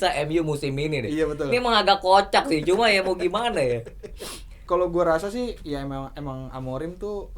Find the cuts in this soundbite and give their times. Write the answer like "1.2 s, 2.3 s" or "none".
4.6 s